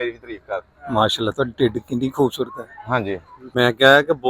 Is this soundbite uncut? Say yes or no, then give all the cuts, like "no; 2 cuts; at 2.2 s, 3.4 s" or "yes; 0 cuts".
no; 1 cut; at 3.4 s